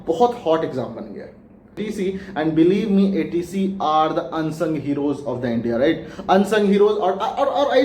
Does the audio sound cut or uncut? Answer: cut